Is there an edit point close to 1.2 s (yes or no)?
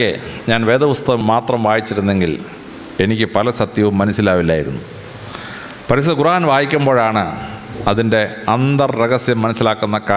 yes